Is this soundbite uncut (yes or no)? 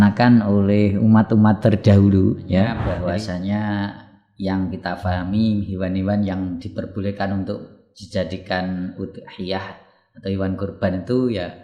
no